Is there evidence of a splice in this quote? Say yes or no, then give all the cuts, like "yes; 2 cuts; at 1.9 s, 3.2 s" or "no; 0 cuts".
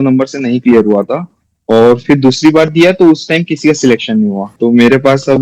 yes; 1 cut; at 4.5 s